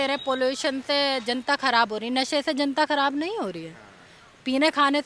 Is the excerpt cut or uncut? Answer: uncut